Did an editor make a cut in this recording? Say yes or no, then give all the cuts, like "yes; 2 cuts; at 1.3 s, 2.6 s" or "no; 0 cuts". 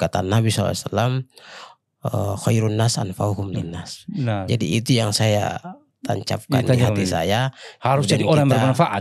no; 0 cuts